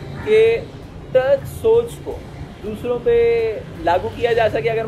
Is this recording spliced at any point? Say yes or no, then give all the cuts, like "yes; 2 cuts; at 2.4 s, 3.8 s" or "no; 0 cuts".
no; 0 cuts